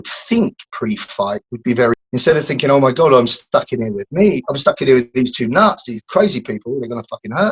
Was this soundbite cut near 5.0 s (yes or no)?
no